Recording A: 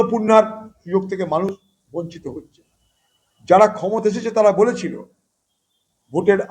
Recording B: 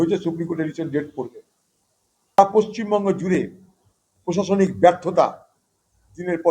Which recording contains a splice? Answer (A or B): B